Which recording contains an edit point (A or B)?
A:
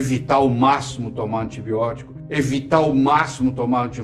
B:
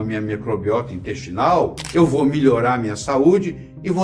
B